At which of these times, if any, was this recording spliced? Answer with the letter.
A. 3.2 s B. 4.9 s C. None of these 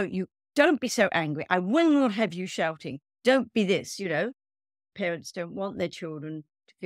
B